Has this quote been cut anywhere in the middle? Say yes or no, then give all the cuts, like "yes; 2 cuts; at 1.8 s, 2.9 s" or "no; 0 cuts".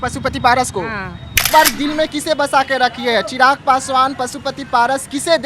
yes; 1 cut; at 1.4 s